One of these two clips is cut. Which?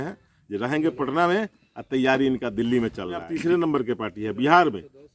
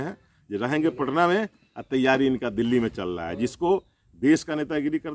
first; 1 cut; at 3.3 s

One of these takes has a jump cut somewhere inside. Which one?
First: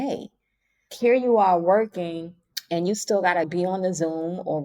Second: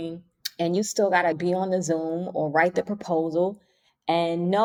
first; 1 cut; at 0.9 s

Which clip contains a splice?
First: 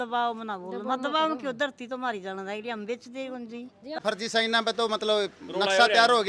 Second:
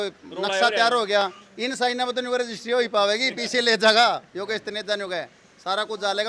first; 1 cut; at 4.0 s

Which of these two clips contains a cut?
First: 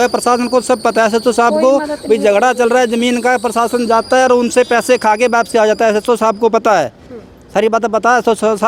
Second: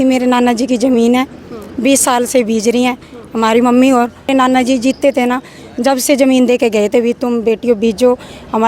second; 1 cut; at 4.3 s

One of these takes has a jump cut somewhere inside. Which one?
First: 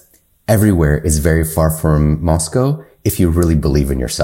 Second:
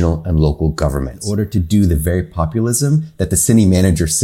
second; 1 cut; at 1.2 s

